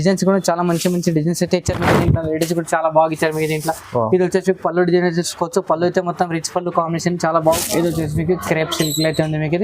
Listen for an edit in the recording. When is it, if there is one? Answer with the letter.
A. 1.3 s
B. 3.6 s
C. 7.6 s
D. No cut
C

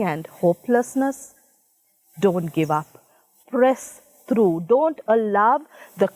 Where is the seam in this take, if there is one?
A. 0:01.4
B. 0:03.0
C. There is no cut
C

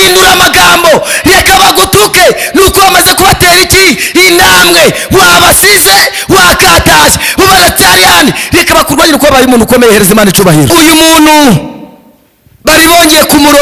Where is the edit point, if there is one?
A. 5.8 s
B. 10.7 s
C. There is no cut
B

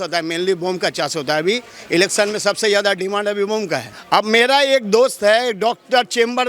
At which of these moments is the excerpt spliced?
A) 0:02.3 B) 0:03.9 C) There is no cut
B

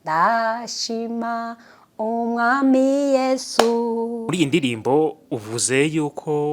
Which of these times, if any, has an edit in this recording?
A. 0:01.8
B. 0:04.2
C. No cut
B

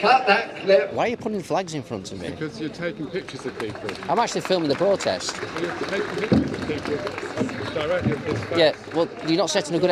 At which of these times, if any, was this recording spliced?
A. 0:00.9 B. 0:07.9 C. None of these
A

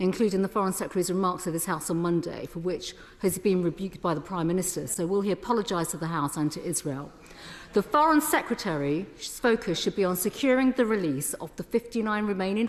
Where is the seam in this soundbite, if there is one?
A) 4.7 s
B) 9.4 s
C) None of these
C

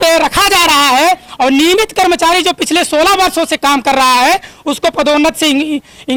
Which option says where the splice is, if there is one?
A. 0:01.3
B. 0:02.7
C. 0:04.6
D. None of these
D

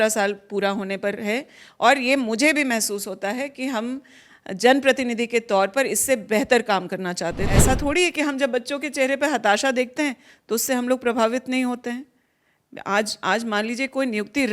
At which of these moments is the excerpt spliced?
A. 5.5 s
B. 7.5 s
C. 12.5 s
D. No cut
B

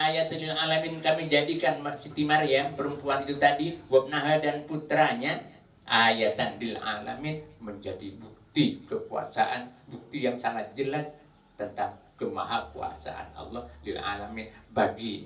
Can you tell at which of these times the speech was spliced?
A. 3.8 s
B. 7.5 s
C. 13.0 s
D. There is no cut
D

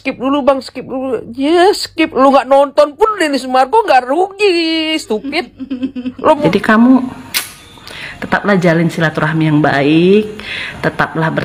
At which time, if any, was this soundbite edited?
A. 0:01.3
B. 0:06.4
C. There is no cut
B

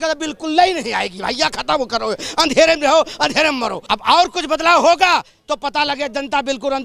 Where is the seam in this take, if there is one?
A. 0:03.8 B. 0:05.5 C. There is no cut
A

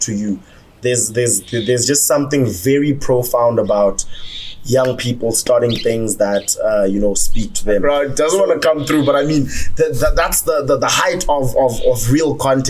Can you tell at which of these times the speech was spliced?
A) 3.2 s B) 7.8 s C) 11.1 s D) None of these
B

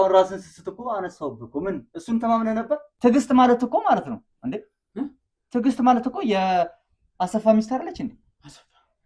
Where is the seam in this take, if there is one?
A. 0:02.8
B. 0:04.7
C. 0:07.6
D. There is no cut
A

